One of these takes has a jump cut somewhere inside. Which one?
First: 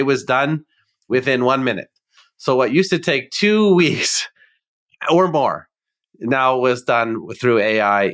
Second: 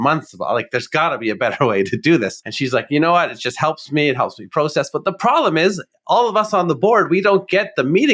second; 1 cut; at 2.4 s

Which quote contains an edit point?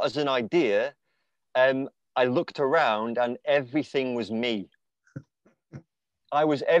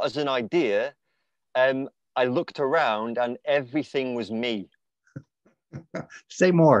first; 1 cut; at 5.9 s

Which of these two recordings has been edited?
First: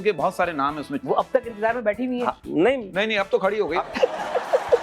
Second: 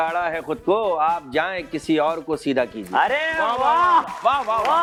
first; 2 cuts; at 1.0 s, 3.8 s

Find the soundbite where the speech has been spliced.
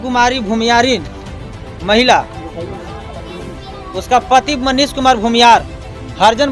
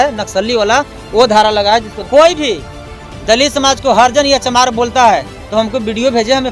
second; 1 cut; at 2.1 s

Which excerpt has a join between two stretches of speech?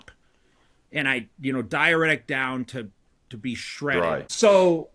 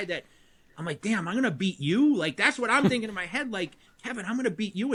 first; 1 cut; at 3.8 s

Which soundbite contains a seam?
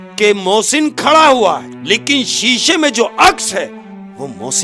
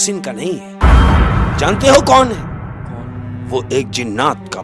first; 1 cut; at 1.7 s

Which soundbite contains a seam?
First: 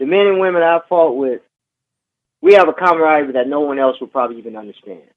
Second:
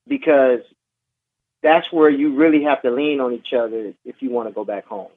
first; 1 cut; at 1.6 s

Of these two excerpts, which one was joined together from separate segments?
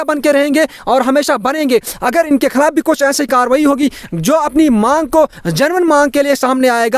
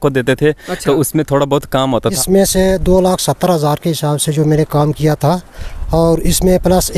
second; 1 cut; at 2.2 s

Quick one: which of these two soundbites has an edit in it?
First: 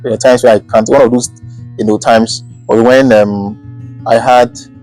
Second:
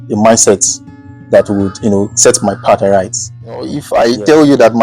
second; 1 cut; at 3.9 s

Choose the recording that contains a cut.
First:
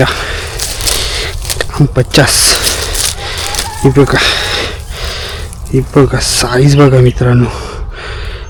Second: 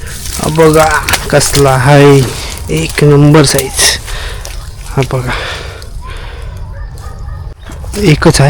second; 1 cut; at 7.6 s

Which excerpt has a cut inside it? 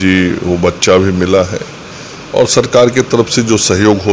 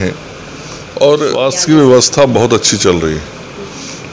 second; 1 cut; at 1.4 s

